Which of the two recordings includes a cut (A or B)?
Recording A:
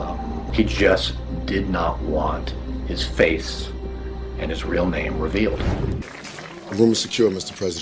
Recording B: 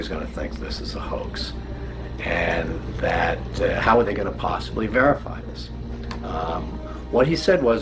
B